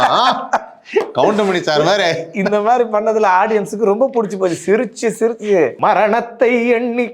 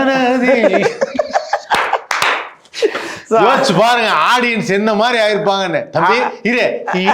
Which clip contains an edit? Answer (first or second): first